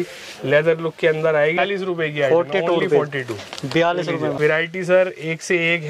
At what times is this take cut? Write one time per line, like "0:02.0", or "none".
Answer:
0:01.6
0:04.4